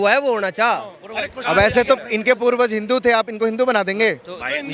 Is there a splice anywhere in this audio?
no; 0 cuts

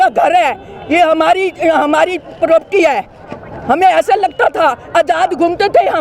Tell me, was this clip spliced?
no; 0 cuts

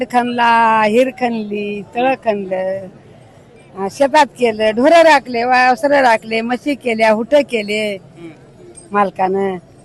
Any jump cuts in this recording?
no; 0 cuts

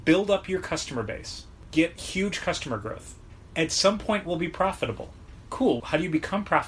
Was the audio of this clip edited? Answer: yes; 2 cuts; at 1.6 s, 5.8 s

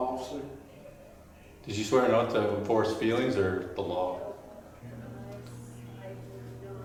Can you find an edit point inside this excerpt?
no; 0 cuts

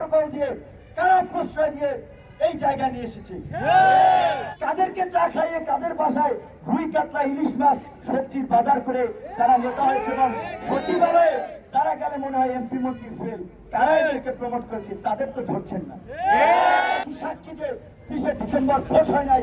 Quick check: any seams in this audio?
yes; 2 cuts; at 4.5 s, 17.0 s

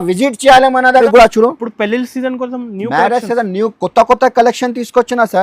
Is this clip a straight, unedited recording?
no; 1 cut; at 1.0 s

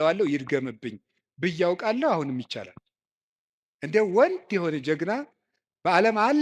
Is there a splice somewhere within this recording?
no; 0 cuts

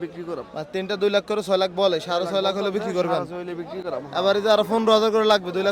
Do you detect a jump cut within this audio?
no; 0 cuts

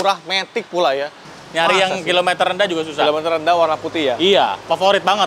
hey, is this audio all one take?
no; 1 cut; at 1.2 s

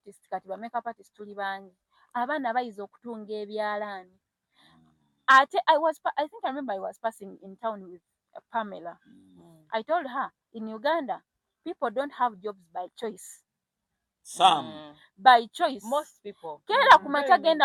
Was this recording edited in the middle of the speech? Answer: no; 0 cuts

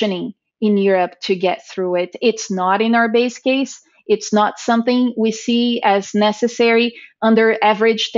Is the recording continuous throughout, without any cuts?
yes; 0 cuts

